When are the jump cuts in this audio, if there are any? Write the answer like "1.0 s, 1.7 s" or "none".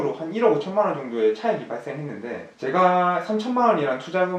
none